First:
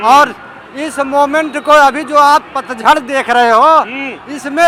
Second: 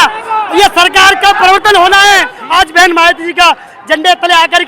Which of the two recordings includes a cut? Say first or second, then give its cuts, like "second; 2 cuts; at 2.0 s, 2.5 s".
second; 1 cut; at 2.4 s